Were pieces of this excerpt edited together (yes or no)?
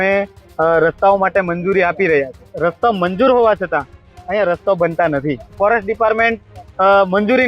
yes